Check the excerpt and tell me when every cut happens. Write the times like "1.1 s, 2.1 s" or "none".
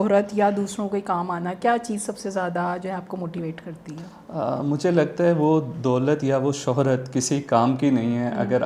none